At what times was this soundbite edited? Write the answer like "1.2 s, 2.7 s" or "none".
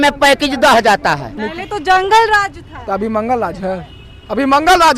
1.5 s